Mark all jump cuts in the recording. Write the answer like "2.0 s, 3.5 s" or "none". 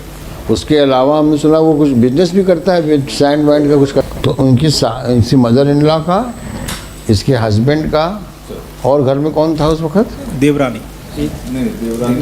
4.0 s